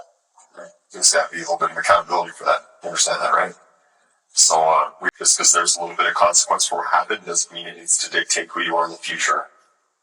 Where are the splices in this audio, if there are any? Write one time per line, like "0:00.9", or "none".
0:05.0